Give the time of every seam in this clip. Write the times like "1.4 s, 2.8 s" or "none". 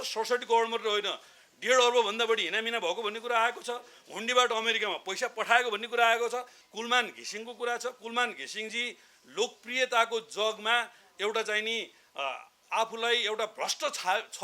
6.6 s